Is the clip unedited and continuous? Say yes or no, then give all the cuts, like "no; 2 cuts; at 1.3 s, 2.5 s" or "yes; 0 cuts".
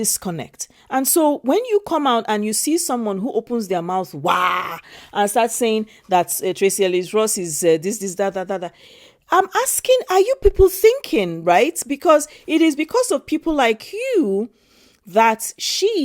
yes; 0 cuts